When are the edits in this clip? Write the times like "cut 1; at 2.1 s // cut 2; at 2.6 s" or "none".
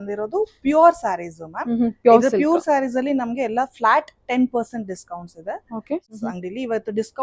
cut 1; at 6.1 s